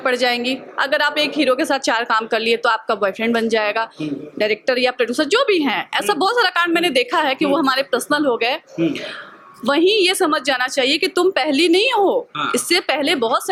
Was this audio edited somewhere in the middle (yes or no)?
no